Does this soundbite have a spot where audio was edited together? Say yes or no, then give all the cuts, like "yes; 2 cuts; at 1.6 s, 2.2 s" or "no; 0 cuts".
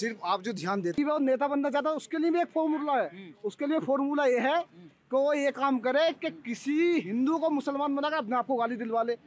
yes; 1 cut; at 1.0 s